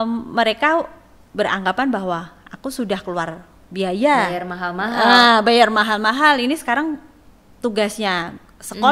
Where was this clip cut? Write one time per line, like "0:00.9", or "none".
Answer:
none